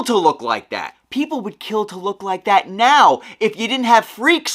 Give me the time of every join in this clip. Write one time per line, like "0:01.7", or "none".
0:01.0

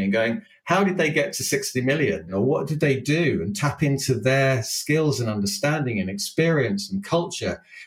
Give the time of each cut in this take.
0:02.3

